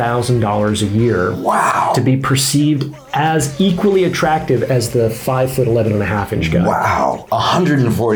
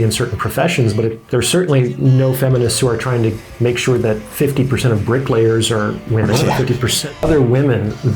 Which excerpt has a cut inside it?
second; 2 cuts; at 1.2 s, 7.1 s

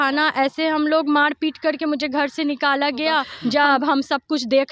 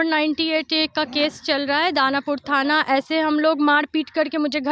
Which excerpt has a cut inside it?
first; 1 cut; at 3.3 s

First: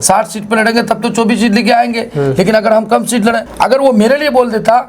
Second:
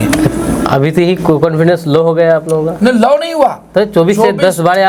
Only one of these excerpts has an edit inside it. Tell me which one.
first; 1 cut; at 3.5 s

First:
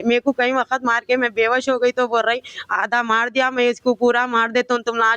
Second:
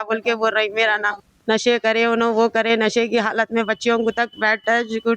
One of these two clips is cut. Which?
second; 1 cut; at 1.7 s

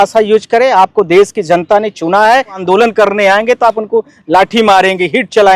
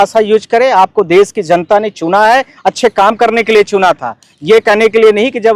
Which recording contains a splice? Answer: first; 1 cut; at 2.6 s

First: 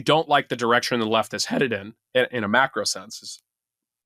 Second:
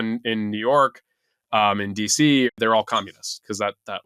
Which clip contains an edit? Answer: second; 1 cut; at 2.5 s

